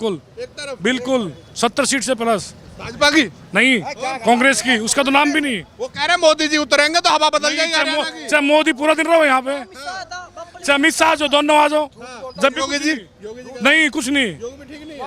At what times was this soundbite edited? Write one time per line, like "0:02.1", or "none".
none